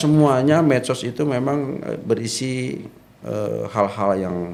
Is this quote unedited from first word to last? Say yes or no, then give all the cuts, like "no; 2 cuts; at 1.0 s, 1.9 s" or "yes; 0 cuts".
yes; 0 cuts